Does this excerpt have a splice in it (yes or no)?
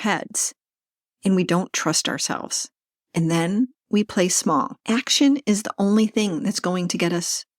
yes